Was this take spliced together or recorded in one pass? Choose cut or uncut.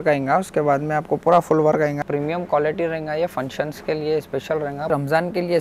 cut